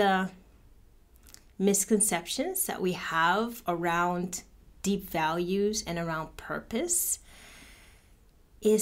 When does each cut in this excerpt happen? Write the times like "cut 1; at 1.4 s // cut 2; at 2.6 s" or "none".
none